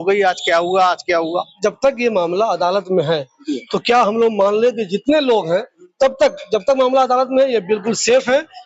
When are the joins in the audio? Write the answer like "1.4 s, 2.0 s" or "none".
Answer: 1.3 s